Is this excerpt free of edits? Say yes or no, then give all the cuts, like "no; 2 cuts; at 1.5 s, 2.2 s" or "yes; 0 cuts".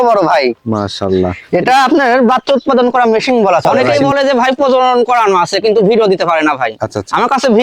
no; 1 cut; at 3.8 s